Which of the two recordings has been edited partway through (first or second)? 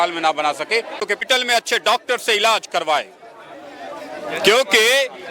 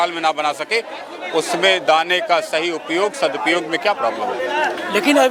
first